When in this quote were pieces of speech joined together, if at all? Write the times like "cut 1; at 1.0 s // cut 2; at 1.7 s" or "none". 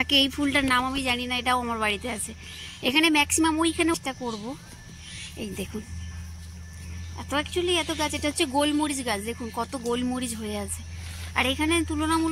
cut 1; at 3.9 s